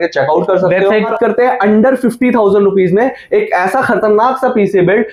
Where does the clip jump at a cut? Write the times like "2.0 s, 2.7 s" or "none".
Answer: 1.0 s